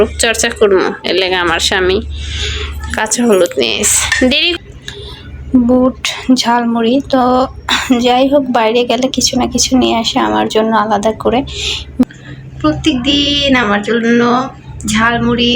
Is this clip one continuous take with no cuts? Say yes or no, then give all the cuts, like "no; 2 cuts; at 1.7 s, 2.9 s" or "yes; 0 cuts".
no; 2 cuts; at 4.6 s, 12.0 s